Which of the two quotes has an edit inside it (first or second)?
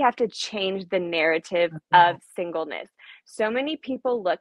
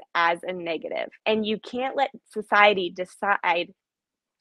second